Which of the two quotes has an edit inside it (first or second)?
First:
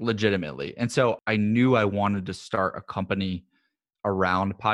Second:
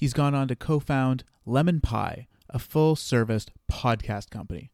first